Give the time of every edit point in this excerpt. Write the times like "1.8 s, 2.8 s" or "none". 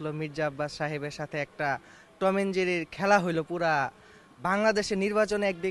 none